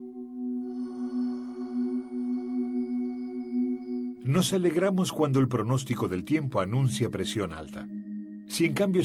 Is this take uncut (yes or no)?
yes